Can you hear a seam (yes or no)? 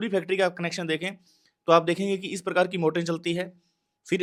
no